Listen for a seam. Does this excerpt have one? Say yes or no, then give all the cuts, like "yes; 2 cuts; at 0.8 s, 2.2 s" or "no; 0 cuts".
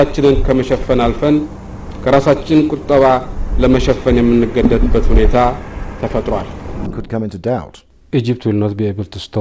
yes; 1 cut; at 6.6 s